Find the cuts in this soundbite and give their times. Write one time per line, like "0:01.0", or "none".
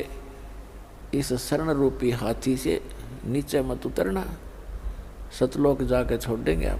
none

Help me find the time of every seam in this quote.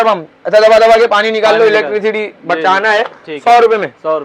none

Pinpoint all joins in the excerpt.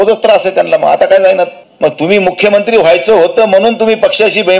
0:01.6

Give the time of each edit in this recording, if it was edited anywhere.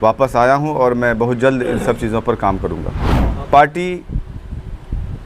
0:03.2

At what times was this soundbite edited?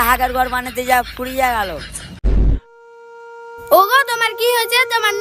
0:02.3

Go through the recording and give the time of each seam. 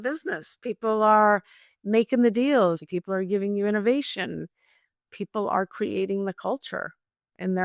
0:02.9

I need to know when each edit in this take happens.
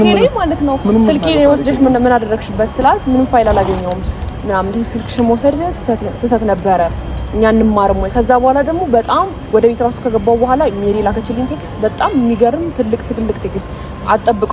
none

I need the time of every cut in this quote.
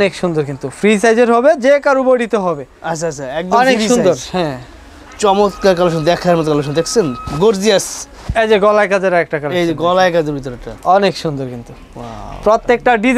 none

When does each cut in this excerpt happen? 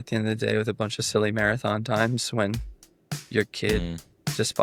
none

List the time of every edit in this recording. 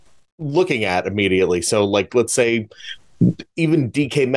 none

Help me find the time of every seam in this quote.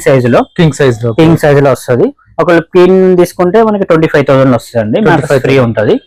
none

